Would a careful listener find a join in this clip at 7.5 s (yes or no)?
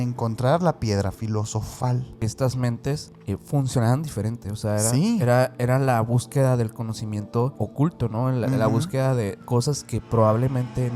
yes